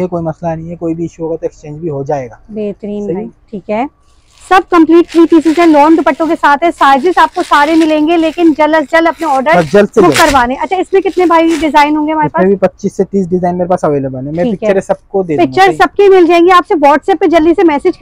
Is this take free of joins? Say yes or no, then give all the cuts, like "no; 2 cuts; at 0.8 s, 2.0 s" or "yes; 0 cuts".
yes; 0 cuts